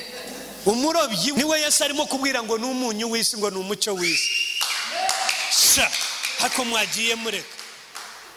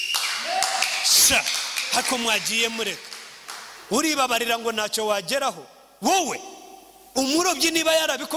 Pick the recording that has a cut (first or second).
first